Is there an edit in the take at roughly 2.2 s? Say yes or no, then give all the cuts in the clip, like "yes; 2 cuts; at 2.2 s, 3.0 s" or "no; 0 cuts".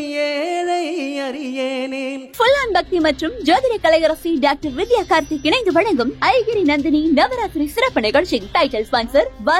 yes; 1 cut; at 2.2 s